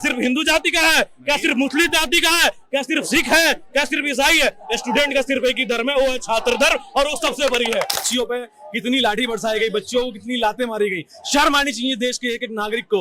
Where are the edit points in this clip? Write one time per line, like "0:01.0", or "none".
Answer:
0:08.0